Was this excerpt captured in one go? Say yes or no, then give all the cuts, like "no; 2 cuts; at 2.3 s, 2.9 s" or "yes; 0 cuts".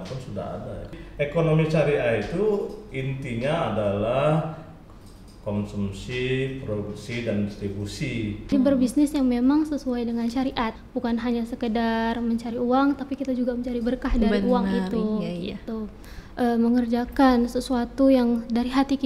no; 4 cuts; at 0.9 s, 8.5 s, 10.8 s, 16.0 s